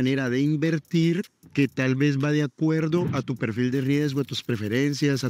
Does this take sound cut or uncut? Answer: uncut